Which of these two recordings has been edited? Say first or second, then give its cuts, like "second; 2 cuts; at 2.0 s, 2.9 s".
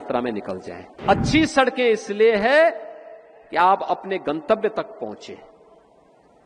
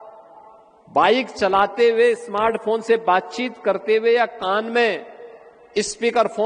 first; 1 cut; at 1.0 s